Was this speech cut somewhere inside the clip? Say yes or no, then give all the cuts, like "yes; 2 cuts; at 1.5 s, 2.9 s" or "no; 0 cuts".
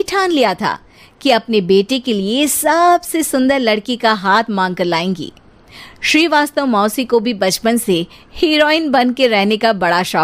no; 0 cuts